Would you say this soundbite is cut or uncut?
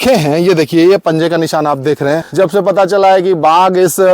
cut